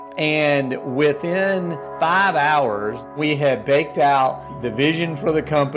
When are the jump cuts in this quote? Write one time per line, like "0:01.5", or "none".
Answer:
0:01.8
0:03.1
0:04.5